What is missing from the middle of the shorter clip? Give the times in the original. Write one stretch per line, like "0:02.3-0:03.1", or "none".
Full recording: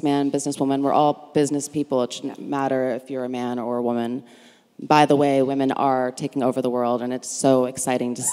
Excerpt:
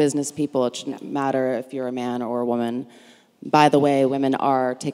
none